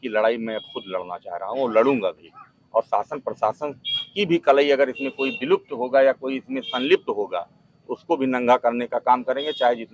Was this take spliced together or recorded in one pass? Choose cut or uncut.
uncut